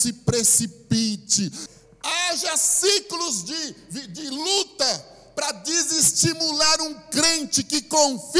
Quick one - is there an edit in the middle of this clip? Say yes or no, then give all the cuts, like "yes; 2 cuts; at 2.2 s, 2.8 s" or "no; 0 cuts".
yes; 1 cut; at 1.6 s